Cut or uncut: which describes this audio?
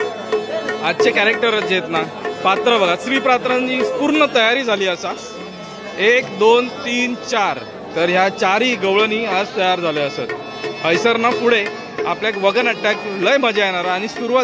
uncut